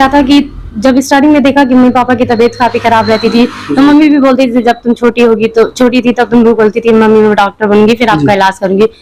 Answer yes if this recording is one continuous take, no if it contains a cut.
yes